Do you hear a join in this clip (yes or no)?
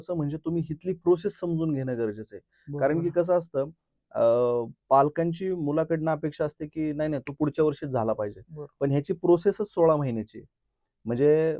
no